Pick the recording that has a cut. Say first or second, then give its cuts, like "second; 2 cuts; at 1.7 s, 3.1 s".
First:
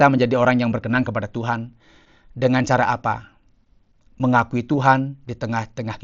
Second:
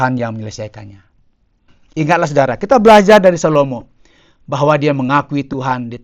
second; 1 cut; at 1.8 s